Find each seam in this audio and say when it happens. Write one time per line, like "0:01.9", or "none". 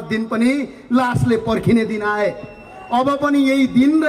none